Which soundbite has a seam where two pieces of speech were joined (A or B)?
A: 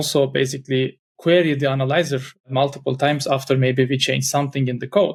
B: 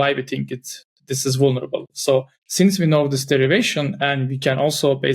B